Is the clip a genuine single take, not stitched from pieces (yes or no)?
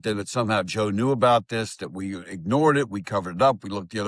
yes